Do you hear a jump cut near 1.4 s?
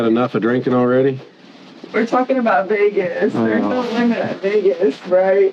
no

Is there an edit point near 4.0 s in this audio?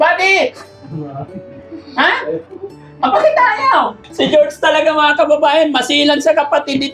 yes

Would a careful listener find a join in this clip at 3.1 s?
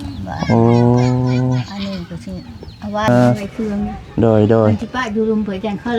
yes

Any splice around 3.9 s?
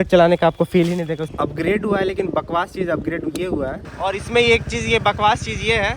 yes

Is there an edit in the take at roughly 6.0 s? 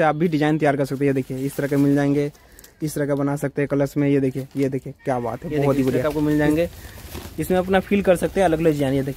yes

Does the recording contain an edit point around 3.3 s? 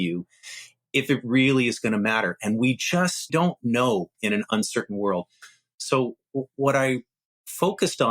yes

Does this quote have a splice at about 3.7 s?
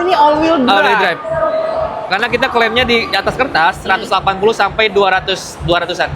no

